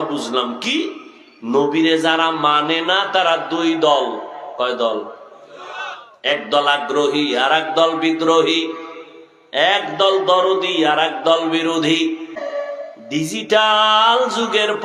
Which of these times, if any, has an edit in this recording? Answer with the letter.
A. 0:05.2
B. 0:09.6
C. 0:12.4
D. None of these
C